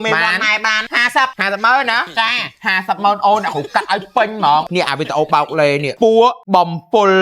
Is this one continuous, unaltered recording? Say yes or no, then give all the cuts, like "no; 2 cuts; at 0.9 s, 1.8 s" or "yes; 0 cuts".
no; 4 cuts; at 1.0 s, 4.7 s, 5.9 s, 6.4 s